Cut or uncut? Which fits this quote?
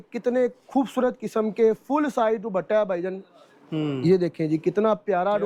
uncut